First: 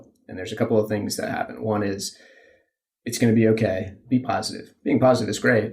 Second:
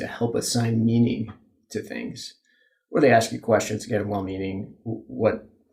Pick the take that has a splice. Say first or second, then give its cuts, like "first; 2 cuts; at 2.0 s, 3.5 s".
first; 1 cut; at 4.0 s